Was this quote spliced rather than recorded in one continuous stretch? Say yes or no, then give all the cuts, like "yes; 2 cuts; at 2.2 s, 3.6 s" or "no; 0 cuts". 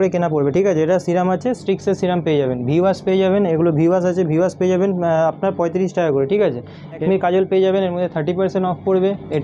no; 0 cuts